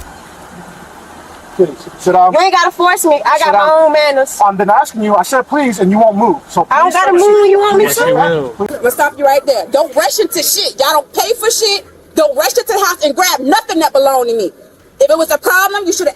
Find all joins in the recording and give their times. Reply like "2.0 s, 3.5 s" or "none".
8.7 s